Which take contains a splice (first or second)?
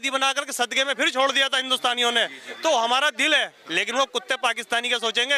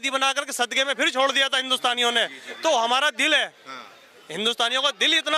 first